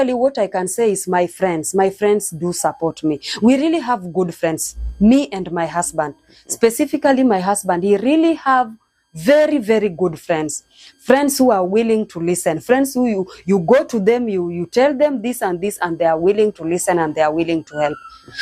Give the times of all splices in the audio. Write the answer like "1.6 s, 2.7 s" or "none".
none